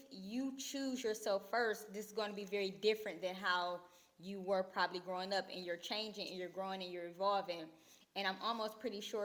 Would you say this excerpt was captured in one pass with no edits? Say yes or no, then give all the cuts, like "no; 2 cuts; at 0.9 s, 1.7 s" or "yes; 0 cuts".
yes; 0 cuts